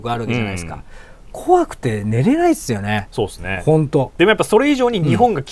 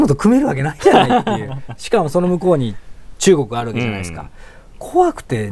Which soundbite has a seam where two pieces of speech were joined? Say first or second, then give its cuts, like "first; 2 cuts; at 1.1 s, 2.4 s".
first; 1 cut; at 3.5 s